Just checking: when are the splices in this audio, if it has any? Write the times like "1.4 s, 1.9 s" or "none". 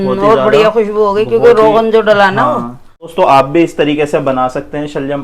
3.1 s